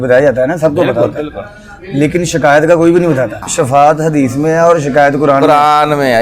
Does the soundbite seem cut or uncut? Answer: cut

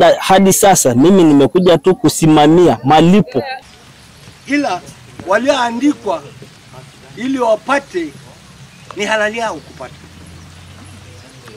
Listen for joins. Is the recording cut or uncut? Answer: cut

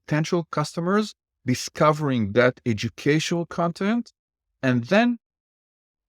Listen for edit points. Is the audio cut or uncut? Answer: uncut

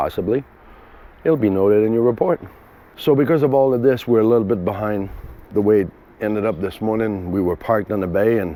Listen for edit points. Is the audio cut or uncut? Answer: uncut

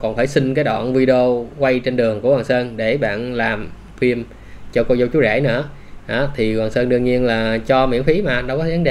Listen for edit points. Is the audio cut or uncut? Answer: uncut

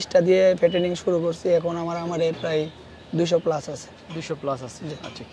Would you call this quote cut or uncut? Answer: uncut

